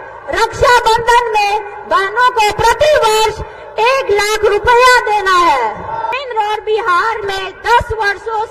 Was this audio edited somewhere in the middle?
yes; 1 cut; at 6.1 s

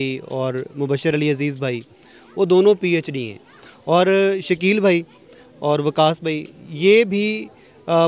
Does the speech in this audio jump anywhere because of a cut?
no; 0 cuts

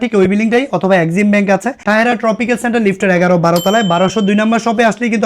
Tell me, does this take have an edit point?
yes; 1 cut; at 1.8 s

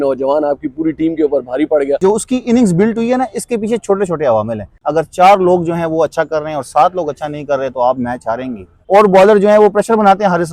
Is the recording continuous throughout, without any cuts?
no; 3 cuts; at 2.0 s, 4.7 s, 8.7 s

